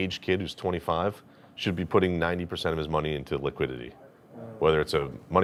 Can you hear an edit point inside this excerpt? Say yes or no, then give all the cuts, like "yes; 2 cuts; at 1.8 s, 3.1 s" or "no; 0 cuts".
no; 0 cuts